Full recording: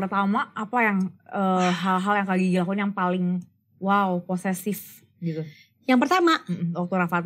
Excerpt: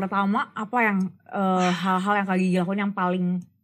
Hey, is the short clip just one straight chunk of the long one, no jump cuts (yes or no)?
yes